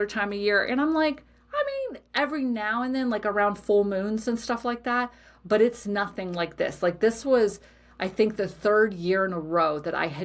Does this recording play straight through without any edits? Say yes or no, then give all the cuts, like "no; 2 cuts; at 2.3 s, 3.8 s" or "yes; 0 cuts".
yes; 0 cuts